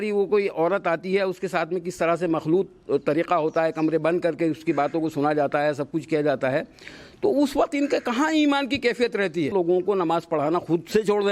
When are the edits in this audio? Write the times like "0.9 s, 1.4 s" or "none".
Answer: 9.5 s